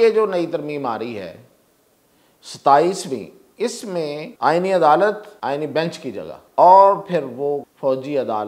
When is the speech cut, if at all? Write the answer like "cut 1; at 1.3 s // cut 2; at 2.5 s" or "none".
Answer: cut 1; at 4.3 s // cut 2; at 5.3 s // cut 3; at 6.4 s // cut 4; at 7.7 s

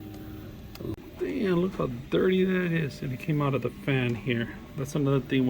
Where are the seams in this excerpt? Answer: cut 1; at 0.9 s

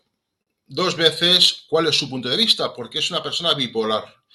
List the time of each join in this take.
none

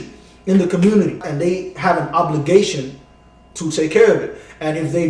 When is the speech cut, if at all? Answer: cut 1; at 1.3 s

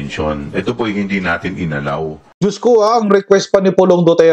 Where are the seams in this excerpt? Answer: cut 1; at 2.3 s

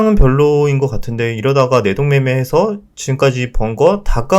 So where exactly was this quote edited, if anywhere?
none

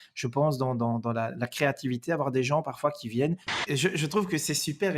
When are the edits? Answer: cut 1; at 3.6 s

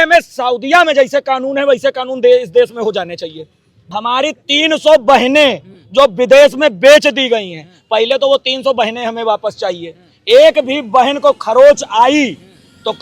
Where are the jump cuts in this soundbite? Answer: cut 1; at 3.7 s

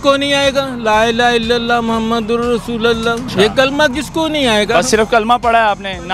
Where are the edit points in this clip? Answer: cut 1; at 3.3 s

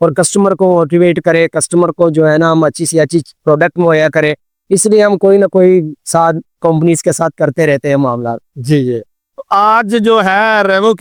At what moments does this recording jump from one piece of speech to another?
none

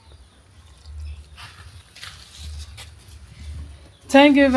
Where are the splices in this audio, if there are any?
cut 1; at 1.8 s

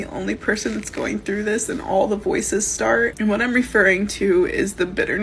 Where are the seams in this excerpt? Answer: cut 1; at 3.2 s

